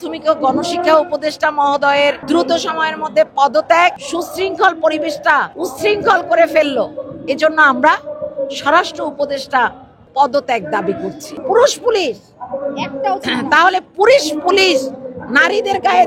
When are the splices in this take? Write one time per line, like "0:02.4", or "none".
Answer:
0:02.2
0:04.1
0:05.6
0:10.0
0:11.3